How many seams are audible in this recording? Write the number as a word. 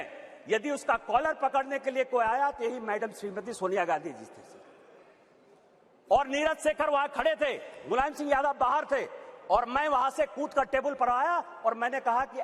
zero